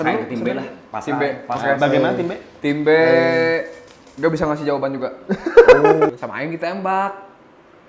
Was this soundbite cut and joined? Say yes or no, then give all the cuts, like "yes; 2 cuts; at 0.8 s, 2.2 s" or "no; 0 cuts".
yes; 1 cut; at 6.1 s